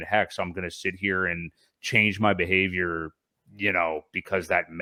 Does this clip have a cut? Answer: no; 0 cuts

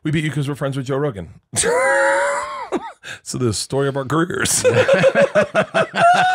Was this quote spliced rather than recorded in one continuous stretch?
no; 0 cuts

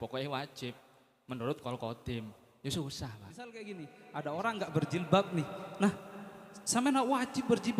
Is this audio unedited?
no; 1 cut; at 3.5 s

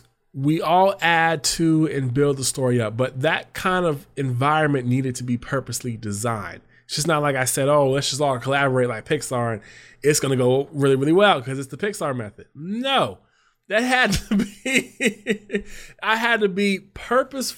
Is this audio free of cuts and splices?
yes; 0 cuts

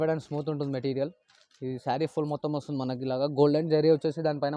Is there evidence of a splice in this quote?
no; 0 cuts

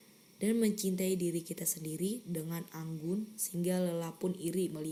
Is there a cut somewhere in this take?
no; 0 cuts

